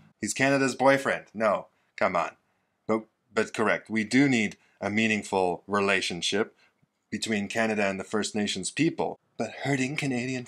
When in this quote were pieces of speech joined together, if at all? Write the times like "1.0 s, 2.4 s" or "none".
9.2 s

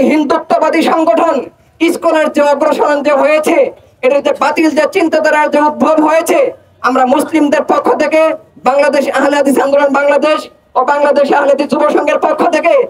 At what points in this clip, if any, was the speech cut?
none

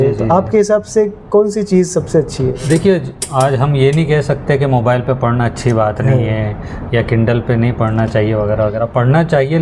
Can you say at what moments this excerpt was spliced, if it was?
none

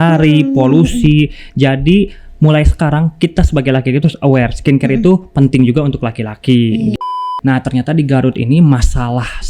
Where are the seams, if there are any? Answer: 7.2 s

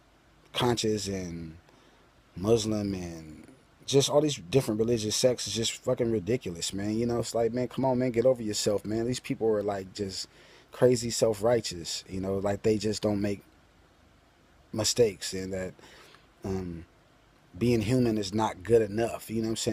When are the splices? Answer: 6.5 s

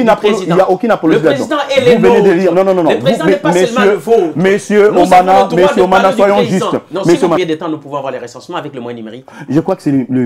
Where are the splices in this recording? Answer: 7.4 s

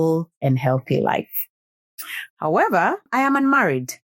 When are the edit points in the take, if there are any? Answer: 3.1 s

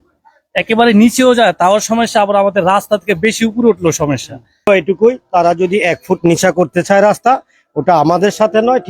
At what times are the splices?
4.7 s

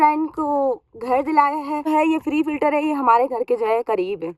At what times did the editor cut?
1.9 s

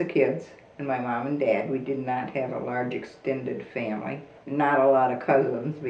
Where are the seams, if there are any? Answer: 4.4 s

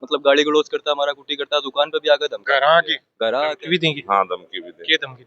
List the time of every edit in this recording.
3.5 s

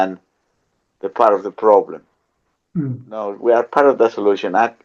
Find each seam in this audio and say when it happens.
3.3 s

